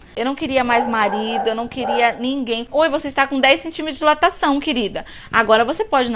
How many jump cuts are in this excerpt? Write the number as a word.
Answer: one